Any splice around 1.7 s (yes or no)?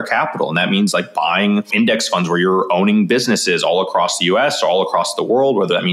yes